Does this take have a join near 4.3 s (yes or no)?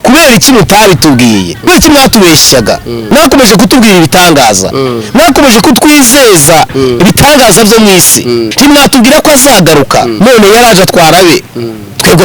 no